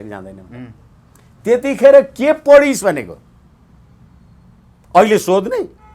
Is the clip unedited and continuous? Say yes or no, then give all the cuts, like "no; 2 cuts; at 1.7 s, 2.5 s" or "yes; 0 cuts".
yes; 0 cuts